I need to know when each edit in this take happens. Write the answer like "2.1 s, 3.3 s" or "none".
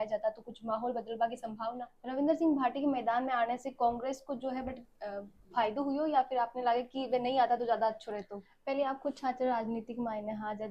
1.9 s, 8.5 s